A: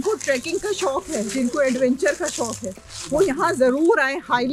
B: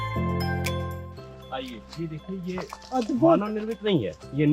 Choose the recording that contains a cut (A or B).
B